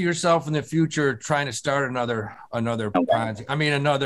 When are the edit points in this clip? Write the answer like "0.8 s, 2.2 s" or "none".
none